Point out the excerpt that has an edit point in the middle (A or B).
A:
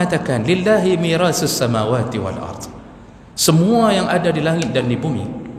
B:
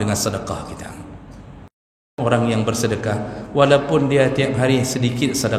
B